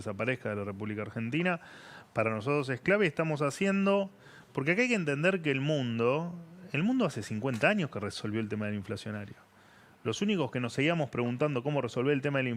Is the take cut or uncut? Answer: uncut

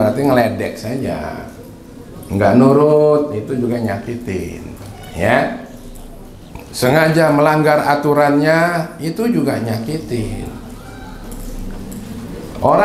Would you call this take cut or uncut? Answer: uncut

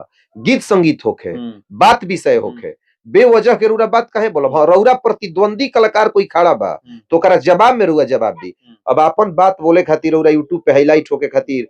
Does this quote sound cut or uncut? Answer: uncut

